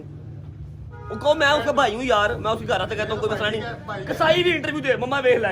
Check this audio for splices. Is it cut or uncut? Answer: uncut